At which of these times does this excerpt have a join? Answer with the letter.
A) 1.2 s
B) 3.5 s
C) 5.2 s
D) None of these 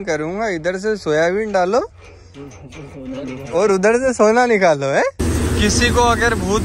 C